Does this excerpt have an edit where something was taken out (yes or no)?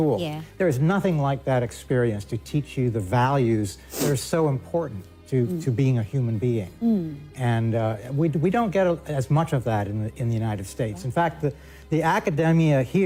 no